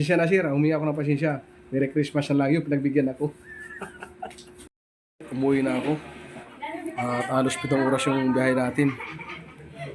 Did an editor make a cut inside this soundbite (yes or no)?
yes